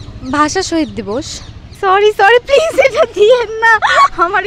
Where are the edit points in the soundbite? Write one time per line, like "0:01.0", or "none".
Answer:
0:01.8